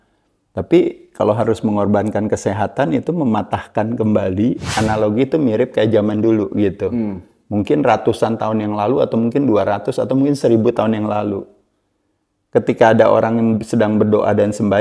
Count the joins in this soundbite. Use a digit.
1